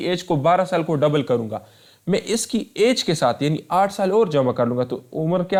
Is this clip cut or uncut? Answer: uncut